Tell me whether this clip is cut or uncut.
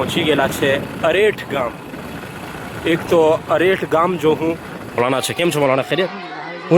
cut